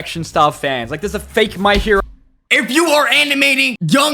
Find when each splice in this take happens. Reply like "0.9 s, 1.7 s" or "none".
2.4 s

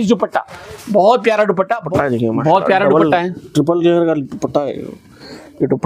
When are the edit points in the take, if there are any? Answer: 1.9 s

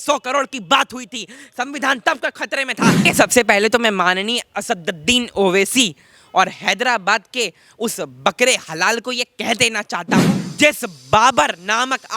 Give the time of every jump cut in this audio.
3.1 s, 10.4 s

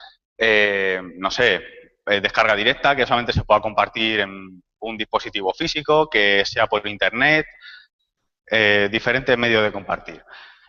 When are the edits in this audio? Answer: none

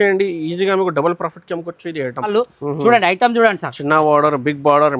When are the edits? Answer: 2.3 s

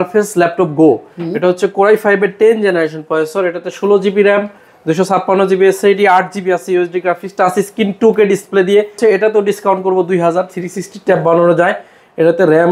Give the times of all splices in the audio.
9.0 s

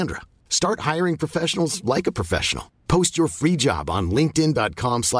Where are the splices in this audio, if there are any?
none

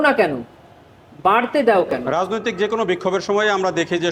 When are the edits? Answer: 2.0 s

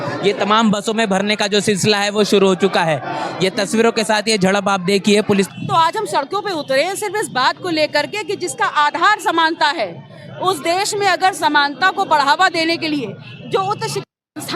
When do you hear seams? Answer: 5.5 s

